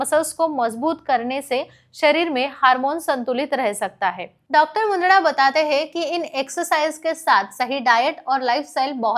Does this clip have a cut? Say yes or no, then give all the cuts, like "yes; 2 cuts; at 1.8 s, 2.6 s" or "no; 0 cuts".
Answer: yes; 1 cut; at 4.4 s